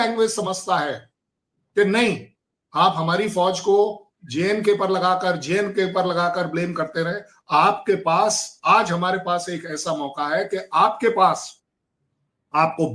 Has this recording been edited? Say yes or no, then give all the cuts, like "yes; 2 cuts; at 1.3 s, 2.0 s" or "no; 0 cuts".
no; 0 cuts